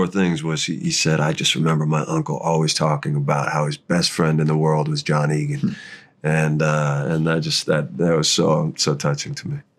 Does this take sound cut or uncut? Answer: uncut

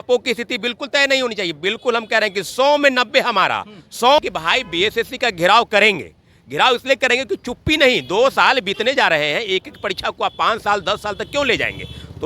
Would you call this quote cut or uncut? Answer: cut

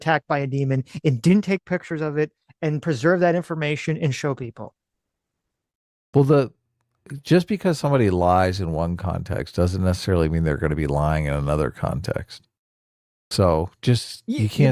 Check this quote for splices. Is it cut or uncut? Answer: uncut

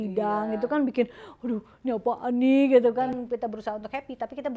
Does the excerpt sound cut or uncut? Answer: cut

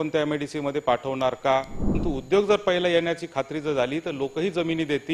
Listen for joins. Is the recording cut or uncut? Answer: cut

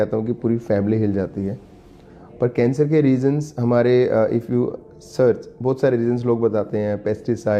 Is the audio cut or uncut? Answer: uncut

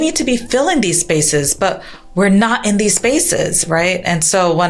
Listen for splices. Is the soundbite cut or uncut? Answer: uncut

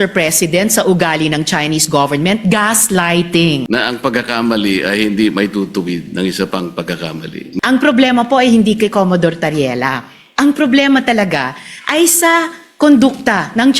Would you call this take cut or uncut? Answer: cut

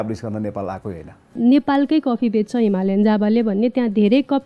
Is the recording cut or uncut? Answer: cut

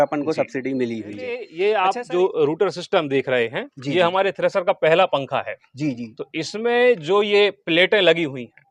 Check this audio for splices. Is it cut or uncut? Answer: cut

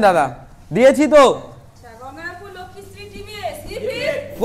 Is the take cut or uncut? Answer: cut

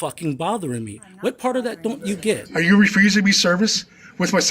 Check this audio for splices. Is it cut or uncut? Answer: cut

